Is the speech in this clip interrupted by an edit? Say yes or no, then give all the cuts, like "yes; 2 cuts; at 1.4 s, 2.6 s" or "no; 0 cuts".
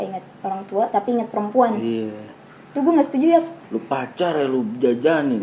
no; 0 cuts